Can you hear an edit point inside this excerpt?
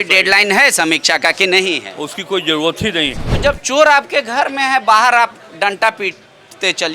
yes; 1 cut; at 3.4 s

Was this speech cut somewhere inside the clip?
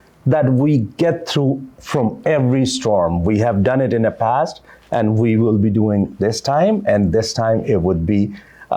no; 0 cuts

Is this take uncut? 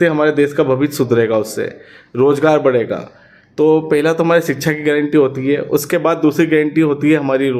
yes; 0 cuts

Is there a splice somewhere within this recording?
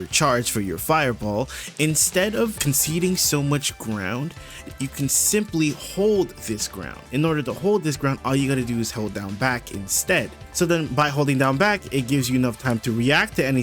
yes; 4 cuts; at 2.6 s, 4.7 s, 7.0 s, 10.4 s

